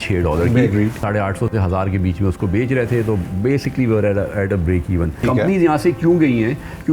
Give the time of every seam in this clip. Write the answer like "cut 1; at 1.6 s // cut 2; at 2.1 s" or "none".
cut 1; at 1.0 s // cut 2; at 5.2 s